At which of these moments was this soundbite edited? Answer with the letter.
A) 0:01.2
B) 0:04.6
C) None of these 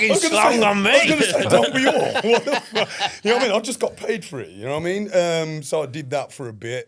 C